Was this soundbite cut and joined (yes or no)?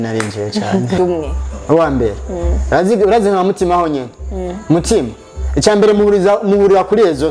yes